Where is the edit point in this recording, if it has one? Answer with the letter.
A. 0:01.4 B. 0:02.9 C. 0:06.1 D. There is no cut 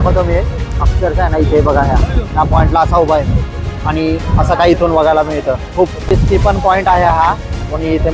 C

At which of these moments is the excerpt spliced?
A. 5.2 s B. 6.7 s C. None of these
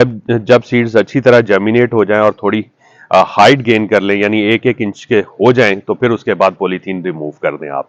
C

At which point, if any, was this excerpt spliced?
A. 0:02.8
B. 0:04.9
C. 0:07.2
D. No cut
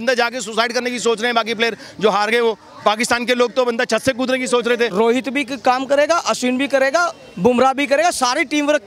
B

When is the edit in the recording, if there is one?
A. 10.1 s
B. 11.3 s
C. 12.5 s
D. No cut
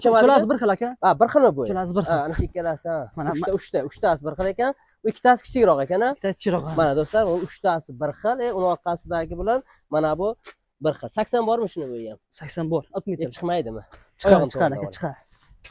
D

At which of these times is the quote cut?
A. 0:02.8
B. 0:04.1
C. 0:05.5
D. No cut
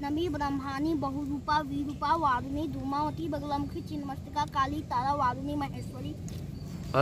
D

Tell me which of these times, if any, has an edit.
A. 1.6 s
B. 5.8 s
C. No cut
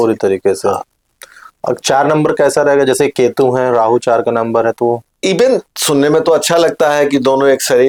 C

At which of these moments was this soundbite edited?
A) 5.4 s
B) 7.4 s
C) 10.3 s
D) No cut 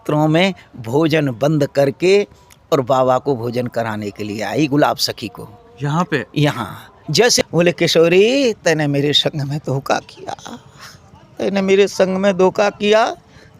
B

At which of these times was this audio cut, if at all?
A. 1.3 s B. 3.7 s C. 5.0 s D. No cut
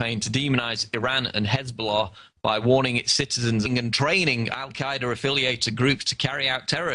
D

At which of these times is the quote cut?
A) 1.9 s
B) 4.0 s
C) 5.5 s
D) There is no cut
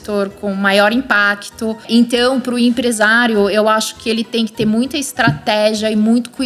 A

